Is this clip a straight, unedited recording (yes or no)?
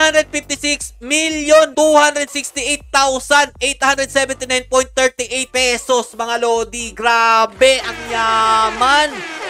yes